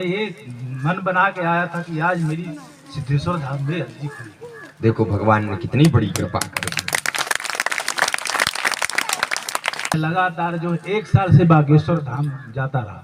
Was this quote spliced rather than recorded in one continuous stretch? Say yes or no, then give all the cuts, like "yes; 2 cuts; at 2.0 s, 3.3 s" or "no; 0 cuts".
yes; 1 cut; at 9.9 s